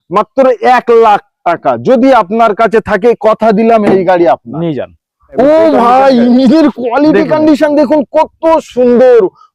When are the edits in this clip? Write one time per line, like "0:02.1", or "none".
0:05.3